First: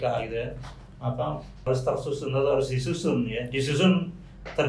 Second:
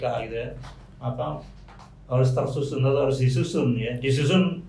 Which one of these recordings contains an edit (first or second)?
first